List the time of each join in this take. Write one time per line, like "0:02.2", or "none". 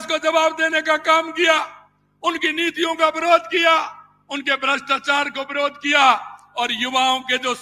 none